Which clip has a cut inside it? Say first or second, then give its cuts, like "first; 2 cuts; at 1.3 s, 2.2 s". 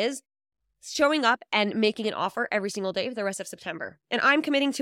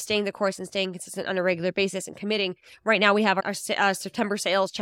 second; 1 cut; at 3.4 s